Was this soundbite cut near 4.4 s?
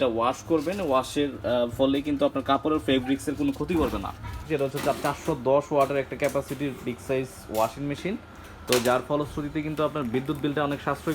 yes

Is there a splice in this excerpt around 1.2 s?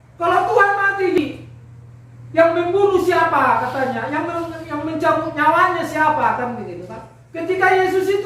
yes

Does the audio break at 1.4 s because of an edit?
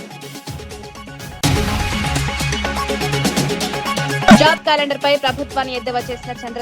yes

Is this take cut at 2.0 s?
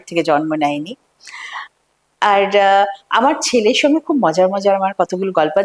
no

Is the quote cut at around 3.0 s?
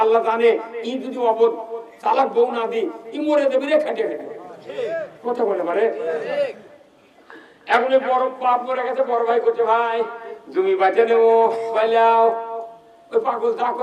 no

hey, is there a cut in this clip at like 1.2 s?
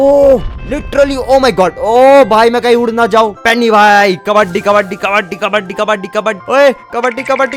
no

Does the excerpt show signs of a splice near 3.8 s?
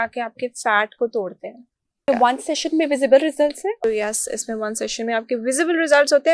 yes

